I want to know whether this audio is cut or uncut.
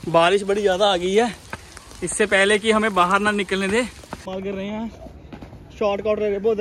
cut